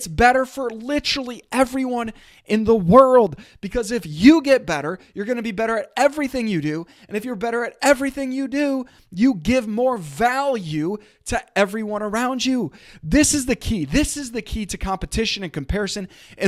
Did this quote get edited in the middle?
no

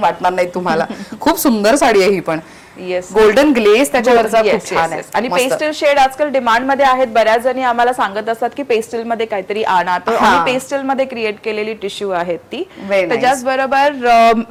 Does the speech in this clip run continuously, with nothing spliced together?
yes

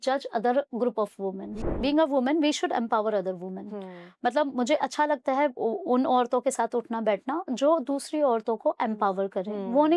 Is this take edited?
yes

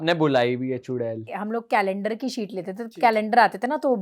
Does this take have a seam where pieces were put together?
yes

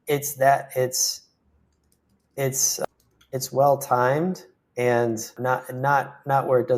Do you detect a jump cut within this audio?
yes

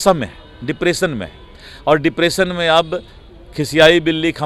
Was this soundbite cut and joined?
no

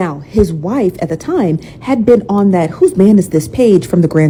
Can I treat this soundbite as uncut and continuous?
yes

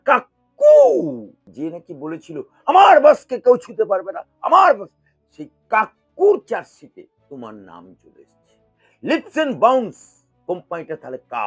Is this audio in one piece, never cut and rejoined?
no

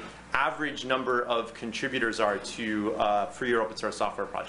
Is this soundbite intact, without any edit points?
yes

